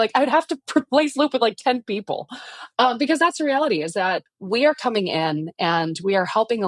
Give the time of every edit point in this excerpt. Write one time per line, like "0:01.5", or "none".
0:04.2